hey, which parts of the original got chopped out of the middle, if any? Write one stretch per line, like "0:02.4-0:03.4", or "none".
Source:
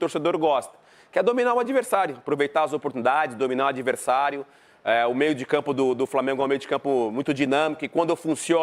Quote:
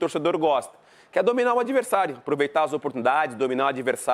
none